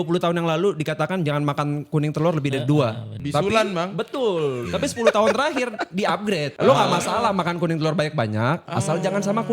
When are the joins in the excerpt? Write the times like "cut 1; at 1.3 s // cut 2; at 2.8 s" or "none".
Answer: cut 1; at 3.1 s